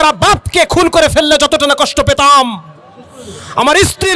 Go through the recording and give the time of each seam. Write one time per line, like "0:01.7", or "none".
none